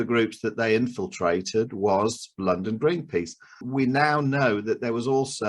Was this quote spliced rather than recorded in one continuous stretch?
yes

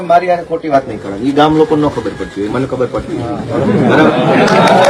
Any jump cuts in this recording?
no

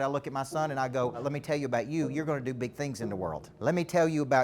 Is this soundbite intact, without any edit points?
no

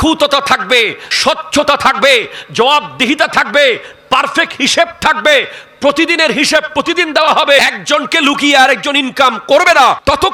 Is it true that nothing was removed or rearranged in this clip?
yes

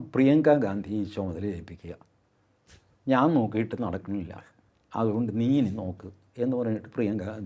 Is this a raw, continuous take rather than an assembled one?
yes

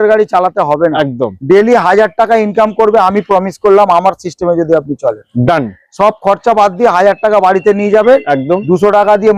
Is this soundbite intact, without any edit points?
yes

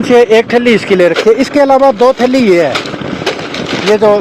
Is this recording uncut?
yes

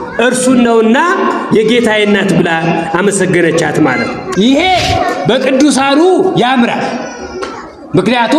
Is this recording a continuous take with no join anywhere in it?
no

